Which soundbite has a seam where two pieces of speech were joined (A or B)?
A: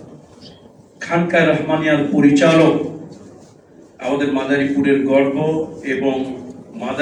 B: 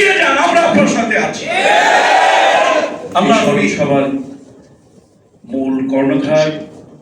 B